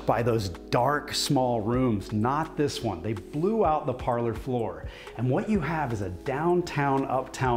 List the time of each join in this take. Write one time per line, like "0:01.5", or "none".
none

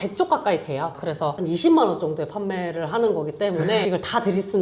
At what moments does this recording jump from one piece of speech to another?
none

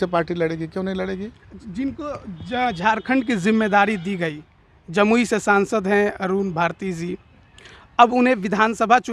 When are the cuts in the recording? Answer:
none

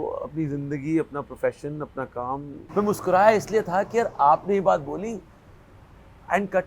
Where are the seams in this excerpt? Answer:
0:02.6

